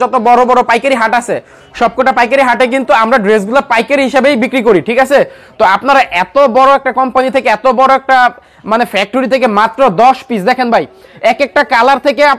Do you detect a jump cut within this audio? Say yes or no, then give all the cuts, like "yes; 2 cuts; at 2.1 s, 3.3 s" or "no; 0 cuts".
no; 0 cuts